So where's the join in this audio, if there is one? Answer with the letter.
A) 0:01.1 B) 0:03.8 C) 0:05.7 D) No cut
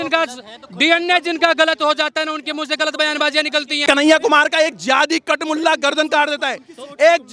B